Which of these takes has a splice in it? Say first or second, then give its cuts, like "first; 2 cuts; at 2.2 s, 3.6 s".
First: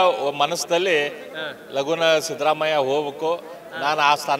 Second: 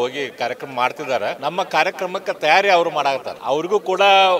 second; 2 cuts; at 1.4 s, 3.3 s